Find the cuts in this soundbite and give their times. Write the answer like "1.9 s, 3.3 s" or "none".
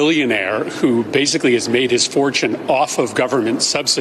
none